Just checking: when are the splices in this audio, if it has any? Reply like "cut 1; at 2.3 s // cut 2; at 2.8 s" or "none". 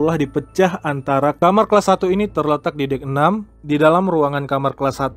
cut 1; at 1.4 s // cut 2; at 3.5 s